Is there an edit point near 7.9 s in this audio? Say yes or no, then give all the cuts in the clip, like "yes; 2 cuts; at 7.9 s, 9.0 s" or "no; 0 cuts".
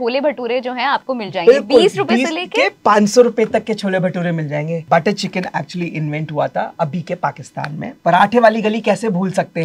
yes; 2 cuts; at 4.8 s, 7.9 s